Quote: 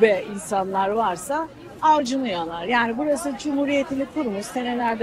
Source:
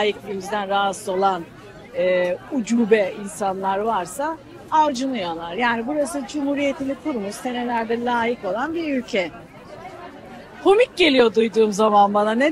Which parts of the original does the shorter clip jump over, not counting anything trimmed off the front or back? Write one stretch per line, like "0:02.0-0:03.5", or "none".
none